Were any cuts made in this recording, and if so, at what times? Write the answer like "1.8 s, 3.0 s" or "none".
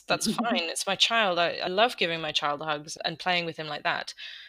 1.7 s, 2.9 s